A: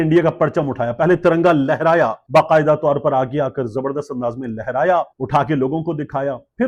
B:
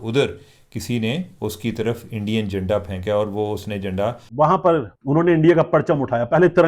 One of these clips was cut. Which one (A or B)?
B